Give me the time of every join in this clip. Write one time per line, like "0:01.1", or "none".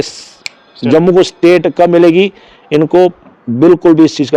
none